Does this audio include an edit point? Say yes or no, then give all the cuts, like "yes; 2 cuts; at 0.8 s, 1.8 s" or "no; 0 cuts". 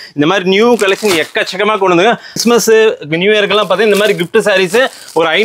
yes; 1 cut; at 2.3 s